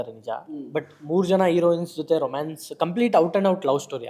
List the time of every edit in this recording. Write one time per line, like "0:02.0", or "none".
none

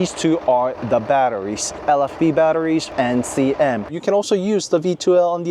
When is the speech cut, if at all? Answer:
0:01.8
0:02.9
0:03.9

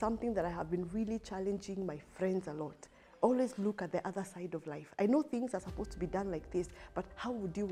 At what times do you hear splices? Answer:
none

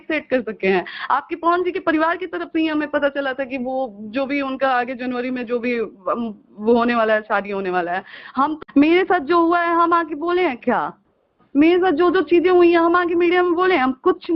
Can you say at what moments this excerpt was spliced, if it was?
0:08.6

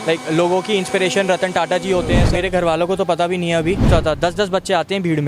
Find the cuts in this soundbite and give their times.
0:02.2
0:03.9

